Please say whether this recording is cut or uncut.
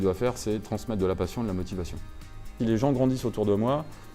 cut